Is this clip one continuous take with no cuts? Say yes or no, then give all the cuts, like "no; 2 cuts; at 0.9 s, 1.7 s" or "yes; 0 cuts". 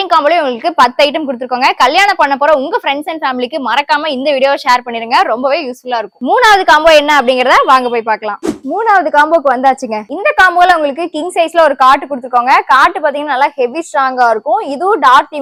yes; 0 cuts